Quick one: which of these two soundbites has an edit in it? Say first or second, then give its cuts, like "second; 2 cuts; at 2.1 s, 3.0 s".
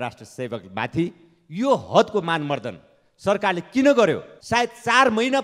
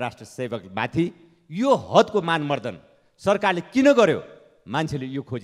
first; 1 cut; at 4.3 s